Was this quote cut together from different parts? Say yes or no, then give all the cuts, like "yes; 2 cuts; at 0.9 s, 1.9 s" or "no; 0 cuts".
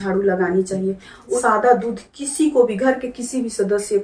yes; 1 cut; at 1.4 s